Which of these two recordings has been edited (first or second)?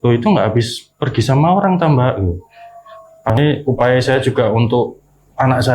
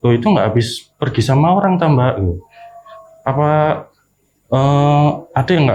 first